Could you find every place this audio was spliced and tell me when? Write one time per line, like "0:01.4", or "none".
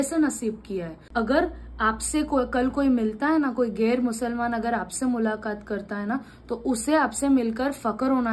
0:01.0